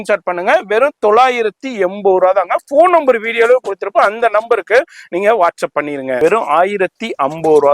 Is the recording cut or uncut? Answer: cut